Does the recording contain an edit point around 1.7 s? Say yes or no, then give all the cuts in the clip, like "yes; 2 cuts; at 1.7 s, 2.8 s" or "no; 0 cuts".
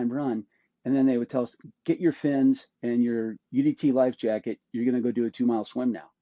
no; 0 cuts